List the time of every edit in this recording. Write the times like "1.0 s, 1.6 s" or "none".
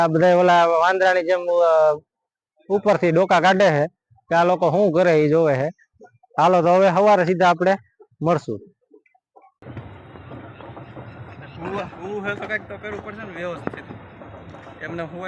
9.6 s